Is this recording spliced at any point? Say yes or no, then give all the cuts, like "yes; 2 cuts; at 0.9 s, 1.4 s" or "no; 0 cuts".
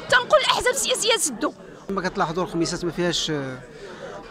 yes; 1 cut; at 1.7 s